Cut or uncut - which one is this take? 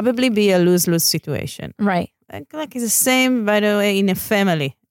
uncut